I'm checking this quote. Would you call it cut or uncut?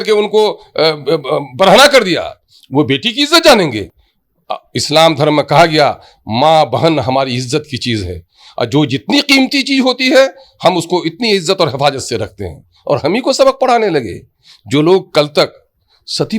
uncut